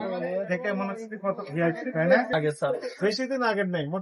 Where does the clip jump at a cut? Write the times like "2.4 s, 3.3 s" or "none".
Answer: 2.3 s